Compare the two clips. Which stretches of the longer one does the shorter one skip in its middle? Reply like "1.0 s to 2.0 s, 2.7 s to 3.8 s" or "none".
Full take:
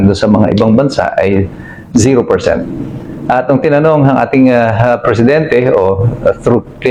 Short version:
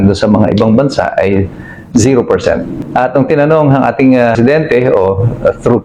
2.8 s to 3.1 s, 4.7 s to 5.2 s